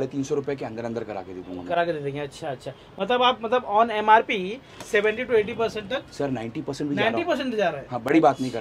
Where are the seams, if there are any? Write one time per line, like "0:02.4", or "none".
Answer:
none